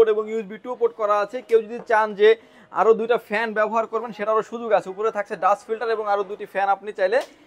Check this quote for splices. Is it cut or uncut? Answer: uncut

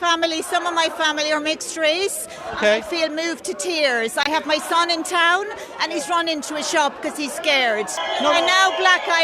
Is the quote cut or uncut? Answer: cut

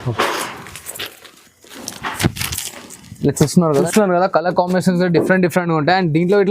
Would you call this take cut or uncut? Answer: cut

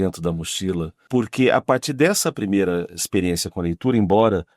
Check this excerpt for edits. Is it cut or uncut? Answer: cut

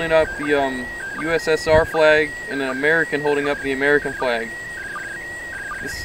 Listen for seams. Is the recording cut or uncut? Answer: uncut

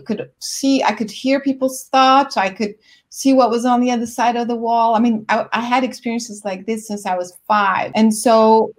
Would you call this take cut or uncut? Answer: cut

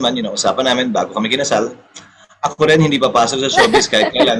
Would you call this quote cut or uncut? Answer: uncut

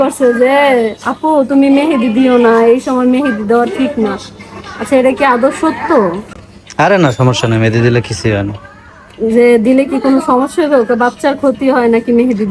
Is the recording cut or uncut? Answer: uncut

